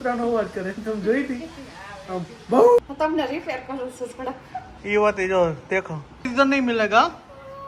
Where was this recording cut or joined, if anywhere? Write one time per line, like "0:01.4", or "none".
0:02.8
0:06.3